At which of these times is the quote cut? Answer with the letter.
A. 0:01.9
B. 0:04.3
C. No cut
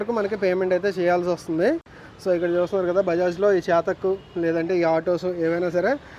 C